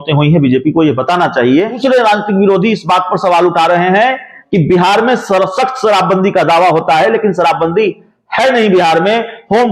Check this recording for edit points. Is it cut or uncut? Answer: cut